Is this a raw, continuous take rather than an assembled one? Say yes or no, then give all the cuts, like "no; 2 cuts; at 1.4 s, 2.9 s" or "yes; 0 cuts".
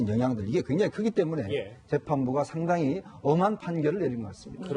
no; 1 cut; at 2.2 s